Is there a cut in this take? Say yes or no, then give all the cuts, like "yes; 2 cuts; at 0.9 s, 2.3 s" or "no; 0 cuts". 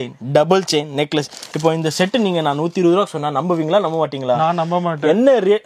no; 0 cuts